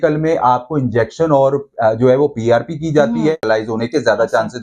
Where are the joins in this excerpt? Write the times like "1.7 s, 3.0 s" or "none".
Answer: 3.4 s